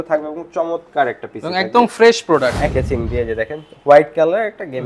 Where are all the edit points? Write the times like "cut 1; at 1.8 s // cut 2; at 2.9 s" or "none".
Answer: cut 1; at 2.7 s